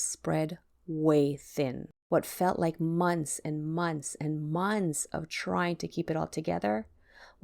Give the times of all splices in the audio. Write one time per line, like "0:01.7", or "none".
0:01.9